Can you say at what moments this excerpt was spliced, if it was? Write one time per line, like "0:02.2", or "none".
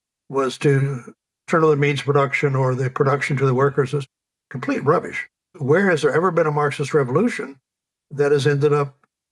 0:05.5